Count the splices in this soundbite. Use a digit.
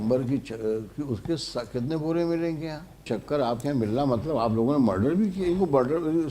1